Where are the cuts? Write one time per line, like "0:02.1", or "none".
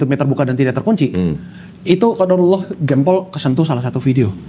none